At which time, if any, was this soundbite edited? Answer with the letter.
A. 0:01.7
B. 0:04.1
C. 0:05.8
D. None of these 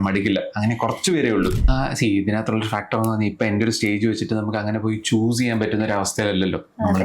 A